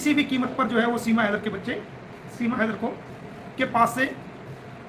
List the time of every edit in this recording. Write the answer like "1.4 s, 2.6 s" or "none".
none